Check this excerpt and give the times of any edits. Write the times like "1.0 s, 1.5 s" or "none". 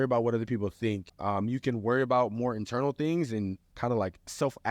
1.1 s, 3.6 s

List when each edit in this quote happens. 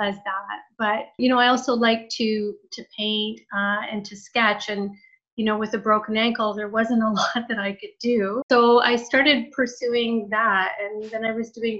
8.4 s

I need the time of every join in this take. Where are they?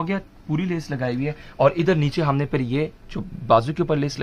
none

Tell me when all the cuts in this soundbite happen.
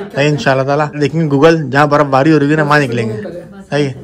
1.0 s

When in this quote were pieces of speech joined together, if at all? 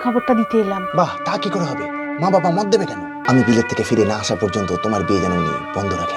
3.2 s

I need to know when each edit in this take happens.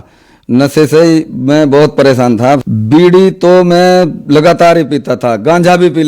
2.6 s

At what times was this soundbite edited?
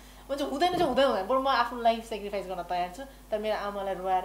none

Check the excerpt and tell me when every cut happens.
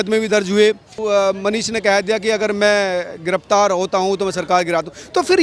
0.9 s

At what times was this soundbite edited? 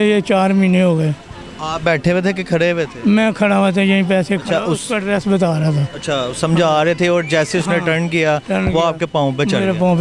none

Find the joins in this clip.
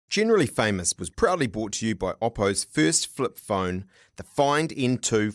none

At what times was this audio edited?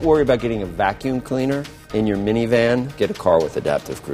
1.8 s, 2.9 s

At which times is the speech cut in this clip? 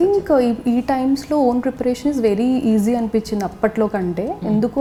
none

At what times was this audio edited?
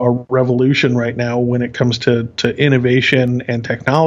none

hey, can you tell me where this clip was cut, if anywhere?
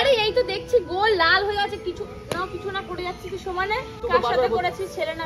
4.0 s

